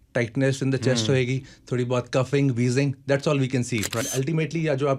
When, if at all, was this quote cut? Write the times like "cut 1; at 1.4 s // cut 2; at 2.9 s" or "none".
cut 1; at 4.0 s